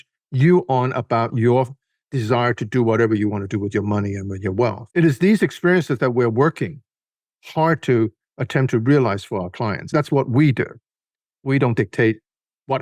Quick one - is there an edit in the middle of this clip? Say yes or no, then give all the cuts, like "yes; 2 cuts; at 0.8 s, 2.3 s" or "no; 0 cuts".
yes; 2 cuts; at 4.8 s, 9.9 s